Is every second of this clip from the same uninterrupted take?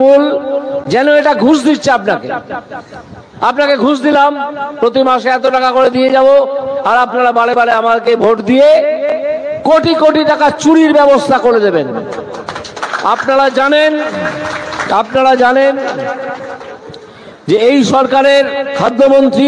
yes; 0 cuts

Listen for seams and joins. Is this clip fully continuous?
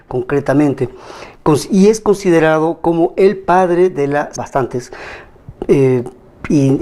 yes; 0 cuts

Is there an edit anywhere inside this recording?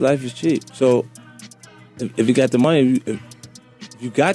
no; 0 cuts

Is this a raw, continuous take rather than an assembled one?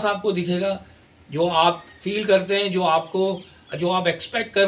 yes; 0 cuts

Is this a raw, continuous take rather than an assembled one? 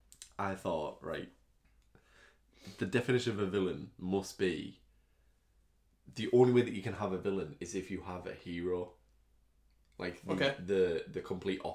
yes; 0 cuts

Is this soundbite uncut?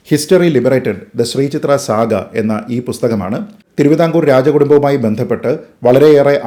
yes; 0 cuts

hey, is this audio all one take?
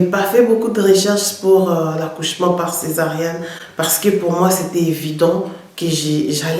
yes; 0 cuts

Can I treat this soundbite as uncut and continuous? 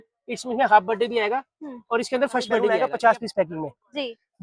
no; 1 cut; at 2.8 s

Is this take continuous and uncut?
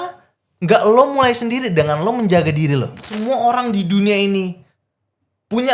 no; 1 cut; at 3.1 s

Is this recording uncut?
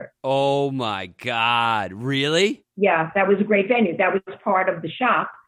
no; 1 cut; at 2.6 s

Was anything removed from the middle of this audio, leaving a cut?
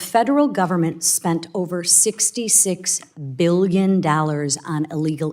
no; 0 cuts

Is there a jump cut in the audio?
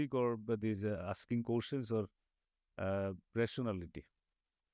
no; 0 cuts

